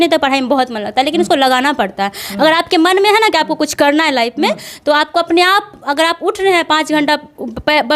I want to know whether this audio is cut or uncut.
uncut